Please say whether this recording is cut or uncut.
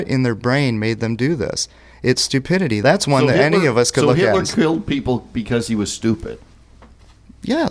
cut